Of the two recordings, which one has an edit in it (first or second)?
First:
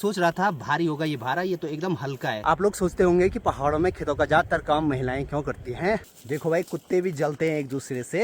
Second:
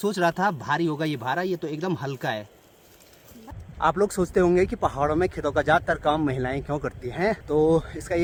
first